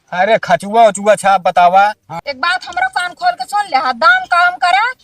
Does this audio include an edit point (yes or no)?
yes